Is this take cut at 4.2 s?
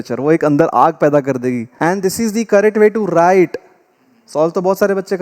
no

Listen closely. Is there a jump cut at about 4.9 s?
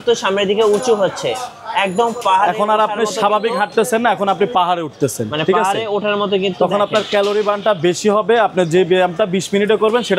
no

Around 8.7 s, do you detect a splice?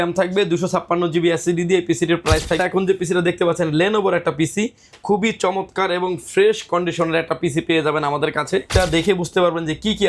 yes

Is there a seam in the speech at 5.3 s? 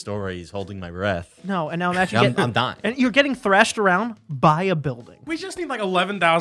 yes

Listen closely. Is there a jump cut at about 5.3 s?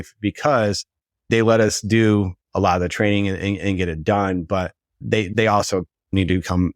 yes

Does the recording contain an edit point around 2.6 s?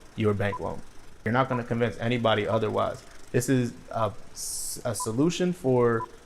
no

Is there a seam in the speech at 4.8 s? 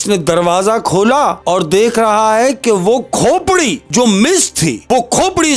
yes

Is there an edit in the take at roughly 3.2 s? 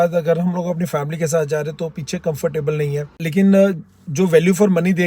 yes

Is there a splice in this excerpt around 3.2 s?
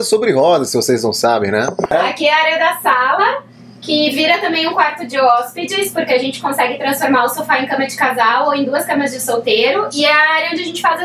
no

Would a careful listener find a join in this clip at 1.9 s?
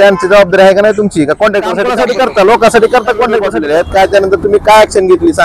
yes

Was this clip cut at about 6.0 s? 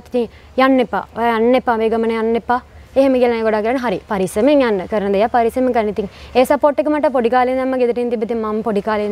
no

